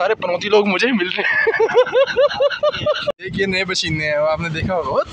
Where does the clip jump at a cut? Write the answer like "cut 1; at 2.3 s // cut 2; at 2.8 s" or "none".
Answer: cut 1; at 3.2 s

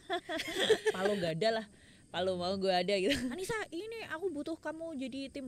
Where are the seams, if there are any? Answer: cut 1; at 1.0 s // cut 2; at 3.4 s

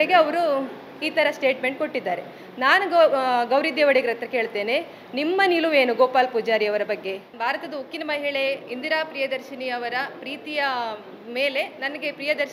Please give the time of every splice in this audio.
cut 1; at 7.3 s

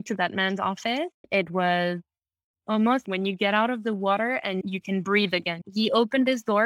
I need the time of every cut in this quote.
cut 1; at 1.3 s // cut 2; at 3.0 s // cut 3; at 4.6 s // cut 4; at 5.5 s

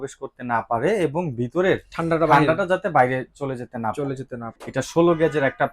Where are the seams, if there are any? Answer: cut 1; at 4.6 s

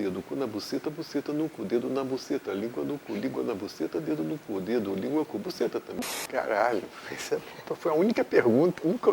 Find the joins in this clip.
cut 1; at 5.9 s

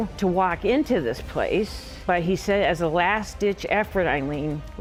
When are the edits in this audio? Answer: none

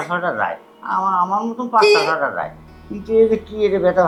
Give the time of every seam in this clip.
none

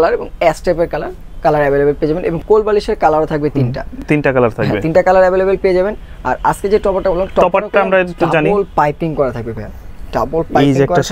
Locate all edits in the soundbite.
none

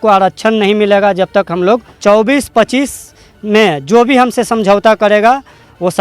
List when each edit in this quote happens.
cut 1; at 1.9 s

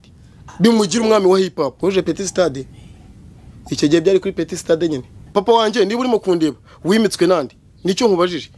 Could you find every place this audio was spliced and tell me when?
cut 1; at 1.8 s // cut 2; at 5.2 s

